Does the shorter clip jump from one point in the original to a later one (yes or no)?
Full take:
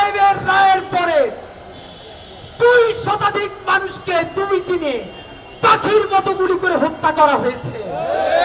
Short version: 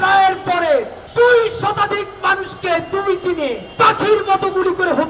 yes